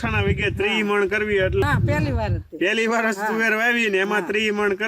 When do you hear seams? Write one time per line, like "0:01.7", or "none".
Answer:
0:01.6

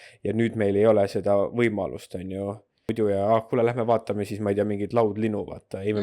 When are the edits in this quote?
0:02.9

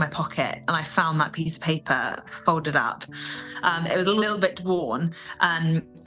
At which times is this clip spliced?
0:04.2

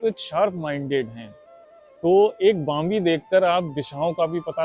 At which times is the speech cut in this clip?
none

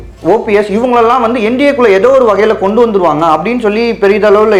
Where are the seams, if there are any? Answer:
none

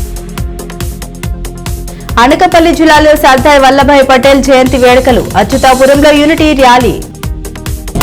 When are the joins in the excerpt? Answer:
0:01.2

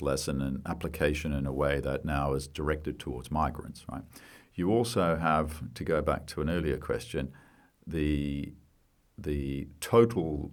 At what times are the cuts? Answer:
none

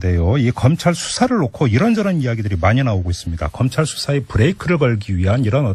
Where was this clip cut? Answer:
none

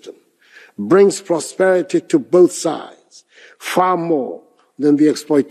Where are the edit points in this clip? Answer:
none

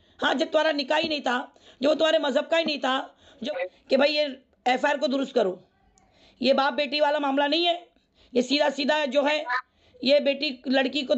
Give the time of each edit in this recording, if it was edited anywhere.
0:03.4

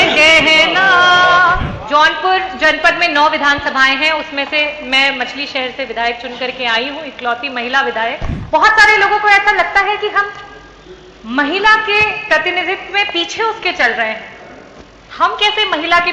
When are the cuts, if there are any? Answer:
0:01.7
0:08.3

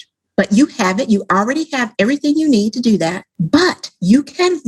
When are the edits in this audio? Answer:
0:03.3

